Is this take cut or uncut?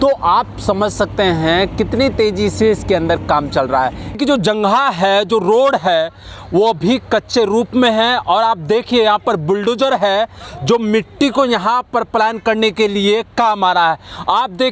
cut